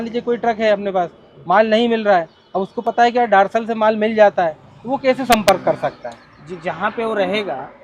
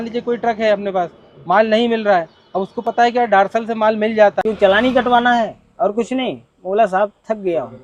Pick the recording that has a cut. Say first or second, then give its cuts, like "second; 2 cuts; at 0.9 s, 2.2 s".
second; 1 cut; at 4.4 s